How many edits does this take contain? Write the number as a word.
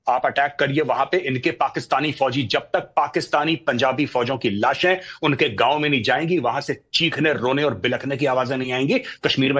zero